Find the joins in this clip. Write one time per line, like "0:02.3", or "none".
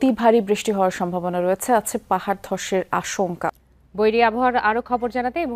0:03.5